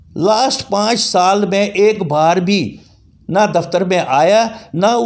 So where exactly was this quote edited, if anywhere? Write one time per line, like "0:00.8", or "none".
none